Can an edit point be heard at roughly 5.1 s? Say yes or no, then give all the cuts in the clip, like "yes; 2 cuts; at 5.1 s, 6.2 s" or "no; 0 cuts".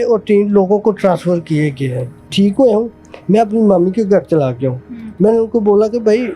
no; 1 cut; at 2.2 s